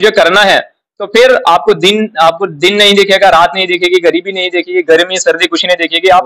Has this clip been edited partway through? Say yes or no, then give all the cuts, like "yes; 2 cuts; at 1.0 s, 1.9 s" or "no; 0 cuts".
no; 0 cuts